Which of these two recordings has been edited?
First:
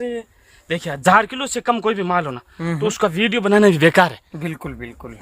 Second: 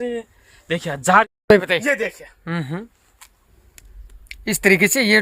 second; 1 cut; at 1.0 s

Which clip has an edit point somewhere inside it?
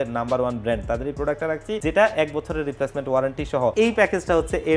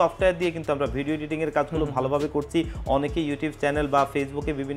first; 2 cuts; at 1.8 s, 3.7 s

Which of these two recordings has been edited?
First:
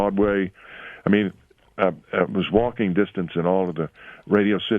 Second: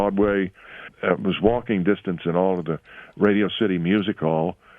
second; 1 cut; at 0.9 s

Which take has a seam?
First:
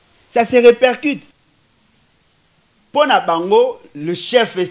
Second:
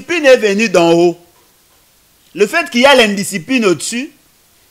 first; 1 cut; at 1.3 s

